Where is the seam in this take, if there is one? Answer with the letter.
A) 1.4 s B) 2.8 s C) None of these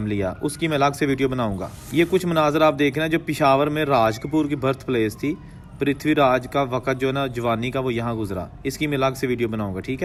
C